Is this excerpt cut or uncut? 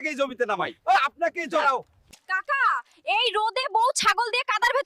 cut